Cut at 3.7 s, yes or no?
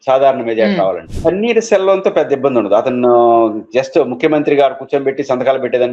no